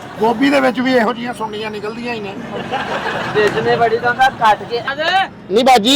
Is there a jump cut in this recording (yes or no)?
yes